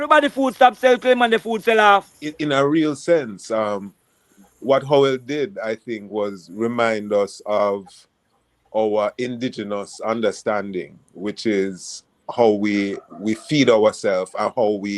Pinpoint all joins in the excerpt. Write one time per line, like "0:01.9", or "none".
0:02.3